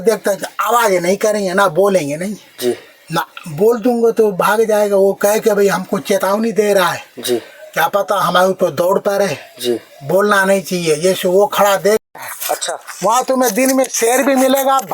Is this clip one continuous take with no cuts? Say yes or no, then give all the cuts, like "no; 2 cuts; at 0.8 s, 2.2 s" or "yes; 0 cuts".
no; 1 cut; at 12.0 s